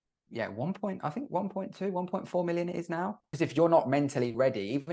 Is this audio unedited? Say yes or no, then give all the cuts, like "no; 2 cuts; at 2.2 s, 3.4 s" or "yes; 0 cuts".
no; 1 cut; at 3.2 s